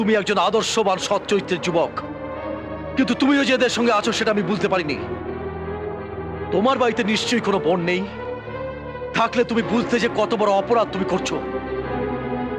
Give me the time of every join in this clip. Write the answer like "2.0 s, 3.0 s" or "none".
none